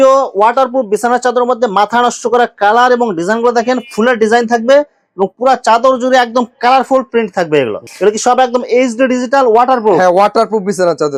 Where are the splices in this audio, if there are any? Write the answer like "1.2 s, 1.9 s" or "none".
none